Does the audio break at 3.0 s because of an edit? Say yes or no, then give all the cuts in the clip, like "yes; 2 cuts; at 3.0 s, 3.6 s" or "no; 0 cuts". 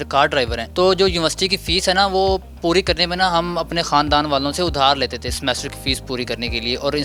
no; 0 cuts